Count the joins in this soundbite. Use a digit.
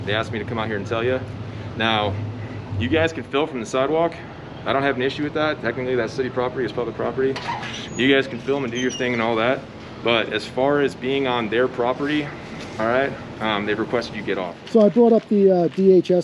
1